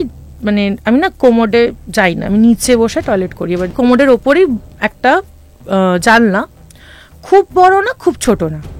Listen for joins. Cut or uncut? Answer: cut